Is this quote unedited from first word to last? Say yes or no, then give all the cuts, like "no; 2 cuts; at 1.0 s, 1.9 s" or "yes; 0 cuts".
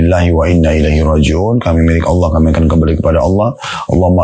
yes; 0 cuts